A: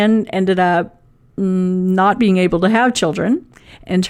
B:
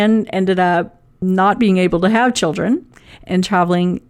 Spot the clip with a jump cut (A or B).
B